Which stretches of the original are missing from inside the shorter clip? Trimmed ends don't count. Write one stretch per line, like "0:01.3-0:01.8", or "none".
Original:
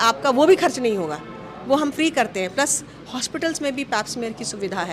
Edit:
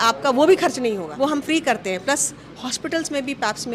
0:01.1-0:01.6